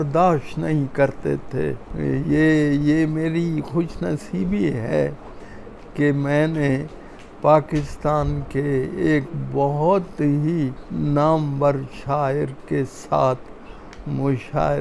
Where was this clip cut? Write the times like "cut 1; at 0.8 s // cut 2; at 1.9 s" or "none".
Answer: cut 1; at 1.9 s // cut 2; at 10.8 s